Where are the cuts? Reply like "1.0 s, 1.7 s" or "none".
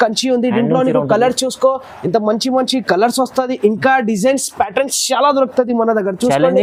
none